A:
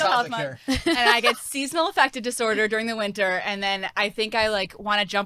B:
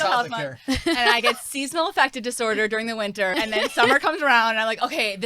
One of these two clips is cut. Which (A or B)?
B